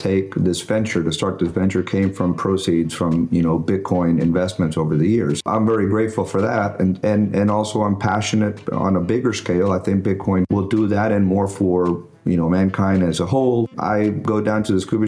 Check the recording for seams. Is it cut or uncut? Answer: cut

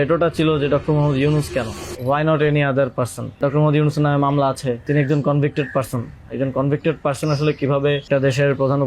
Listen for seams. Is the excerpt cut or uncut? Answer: cut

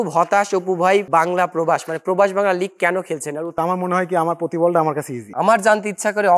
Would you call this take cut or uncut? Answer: cut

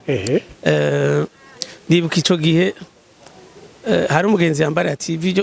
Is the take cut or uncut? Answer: uncut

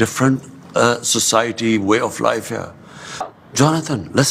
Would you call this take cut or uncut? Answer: cut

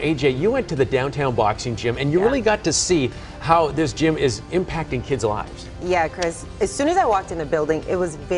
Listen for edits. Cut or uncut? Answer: uncut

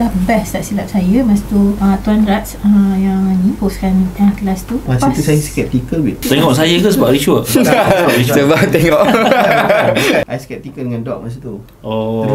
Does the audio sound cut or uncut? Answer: cut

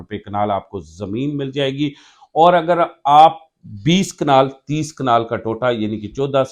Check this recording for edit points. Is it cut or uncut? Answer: uncut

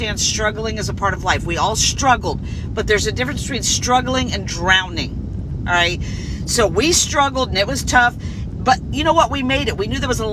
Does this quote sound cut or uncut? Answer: uncut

